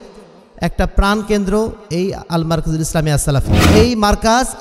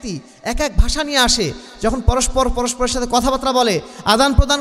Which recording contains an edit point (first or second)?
first